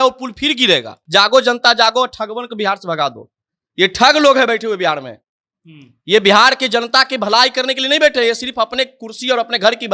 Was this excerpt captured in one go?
no; 1 cut; at 1.0 s

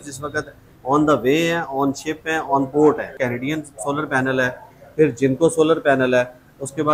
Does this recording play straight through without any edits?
no; 1 cut; at 3.1 s

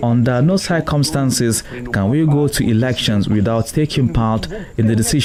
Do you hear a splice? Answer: no; 0 cuts

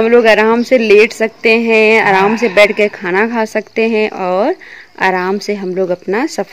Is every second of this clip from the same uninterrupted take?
yes; 0 cuts

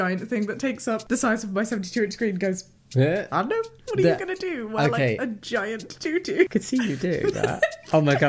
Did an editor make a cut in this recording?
yes; 3 cuts; at 1.0 s, 3.7 s, 6.5 s

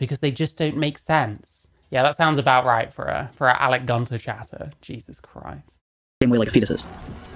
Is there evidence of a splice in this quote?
no; 0 cuts

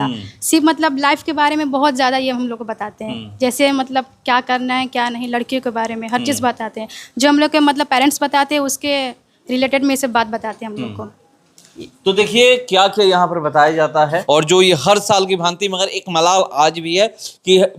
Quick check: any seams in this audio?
no; 0 cuts

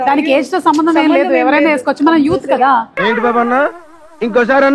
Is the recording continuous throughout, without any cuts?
yes; 0 cuts

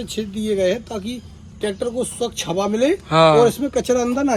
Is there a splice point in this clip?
no; 0 cuts

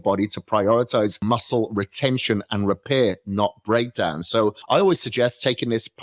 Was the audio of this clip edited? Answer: yes; 2 cuts; at 1.2 s, 4.6 s

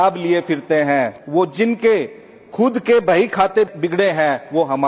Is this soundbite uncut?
no; 2 cuts; at 1.2 s, 3.7 s

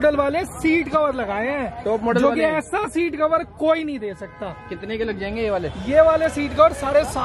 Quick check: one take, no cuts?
yes; 0 cuts

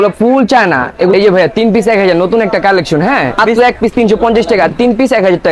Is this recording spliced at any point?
yes; 2 cuts; at 1.1 s, 3.4 s

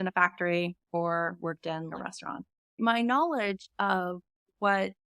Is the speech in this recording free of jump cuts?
no; 1 cut; at 2.8 s

